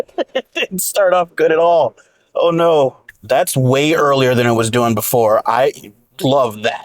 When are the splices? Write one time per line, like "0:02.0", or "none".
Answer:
0:03.1